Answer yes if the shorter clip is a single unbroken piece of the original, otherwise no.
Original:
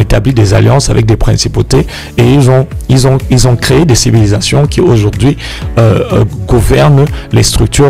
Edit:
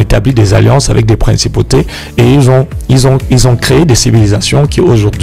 yes